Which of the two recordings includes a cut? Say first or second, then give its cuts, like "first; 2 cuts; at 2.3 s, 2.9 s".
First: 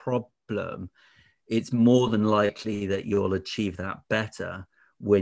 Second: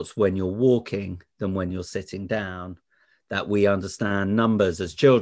second; 1 cut; at 3.1 s